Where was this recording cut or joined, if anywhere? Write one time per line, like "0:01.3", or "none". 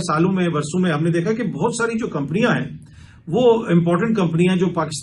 none